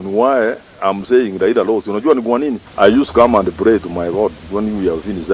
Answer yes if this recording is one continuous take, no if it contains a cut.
no